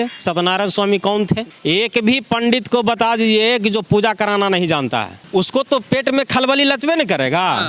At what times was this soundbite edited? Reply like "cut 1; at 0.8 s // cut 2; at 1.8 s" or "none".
cut 1; at 1.5 s // cut 2; at 5.2 s